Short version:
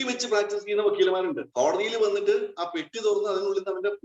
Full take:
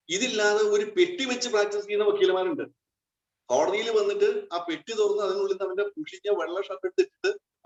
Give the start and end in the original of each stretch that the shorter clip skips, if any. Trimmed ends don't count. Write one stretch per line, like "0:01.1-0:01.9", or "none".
0:02.6-0:03.4